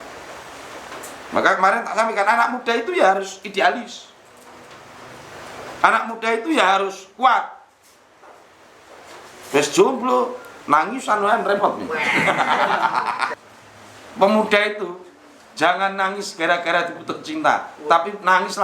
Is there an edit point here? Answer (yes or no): yes